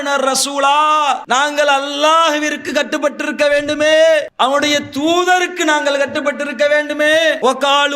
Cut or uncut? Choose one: cut